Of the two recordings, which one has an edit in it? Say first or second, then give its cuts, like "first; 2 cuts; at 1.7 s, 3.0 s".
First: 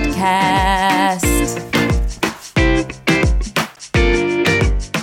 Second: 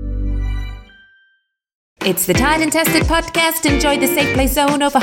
second; 1 cut; at 2.0 s